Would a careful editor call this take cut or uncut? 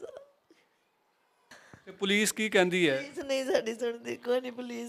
cut